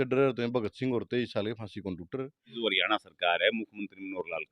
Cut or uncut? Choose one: cut